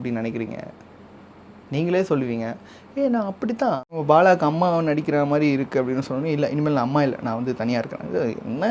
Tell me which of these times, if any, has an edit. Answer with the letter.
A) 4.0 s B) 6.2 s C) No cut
A